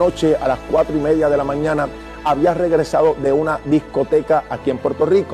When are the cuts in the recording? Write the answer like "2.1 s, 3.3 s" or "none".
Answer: none